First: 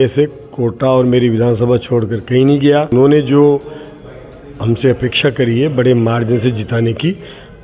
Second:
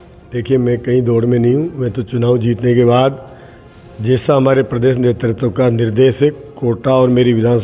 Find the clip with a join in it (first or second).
first